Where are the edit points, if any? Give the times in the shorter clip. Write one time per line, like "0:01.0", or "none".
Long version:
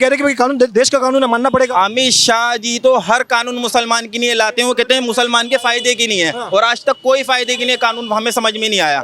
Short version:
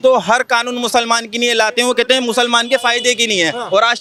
none